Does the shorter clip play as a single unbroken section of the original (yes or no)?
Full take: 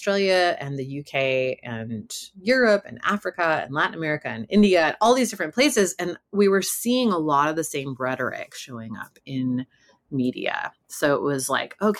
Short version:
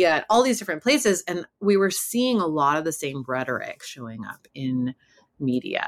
yes